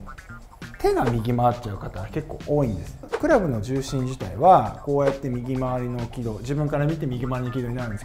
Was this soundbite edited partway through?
yes; 1 cut; at 3.1 s

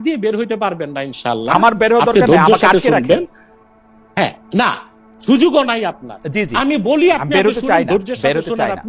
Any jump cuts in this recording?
no; 0 cuts

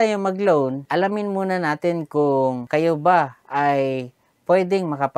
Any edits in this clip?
yes; 2 cuts; at 0.8 s, 2.6 s

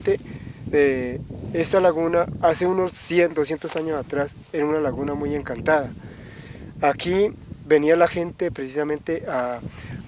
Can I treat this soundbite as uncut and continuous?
yes; 0 cuts

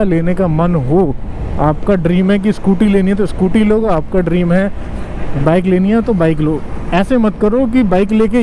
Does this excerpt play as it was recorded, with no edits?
yes; 0 cuts

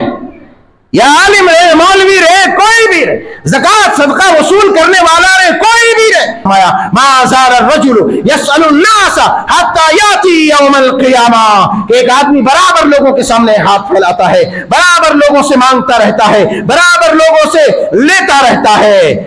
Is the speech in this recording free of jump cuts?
no; 1 cut; at 6.4 s

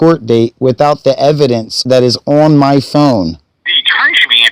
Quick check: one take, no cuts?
no; 2 cuts; at 1.7 s, 3.4 s

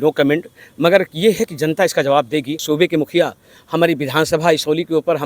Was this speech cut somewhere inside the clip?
yes; 1 cut; at 2.6 s

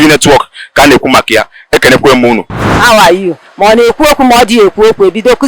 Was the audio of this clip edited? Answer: yes; 1 cut; at 2.5 s

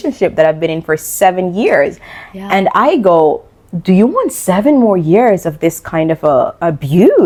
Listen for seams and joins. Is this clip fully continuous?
yes; 0 cuts

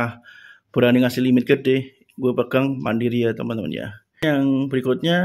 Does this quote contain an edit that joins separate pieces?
yes; 1 cut; at 4.2 s

